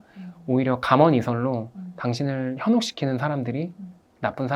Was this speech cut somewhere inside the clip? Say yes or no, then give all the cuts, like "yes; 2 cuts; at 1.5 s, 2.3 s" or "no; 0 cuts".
no; 0 cuts